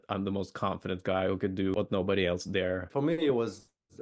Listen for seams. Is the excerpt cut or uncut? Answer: cut